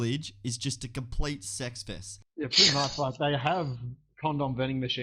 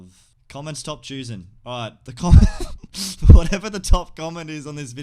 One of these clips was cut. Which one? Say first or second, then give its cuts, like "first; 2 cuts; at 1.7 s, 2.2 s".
first; 1 cut; at 2.1 s